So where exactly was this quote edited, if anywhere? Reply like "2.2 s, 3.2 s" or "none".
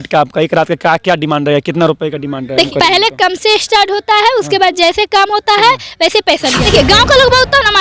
2.7 s, 6.6 s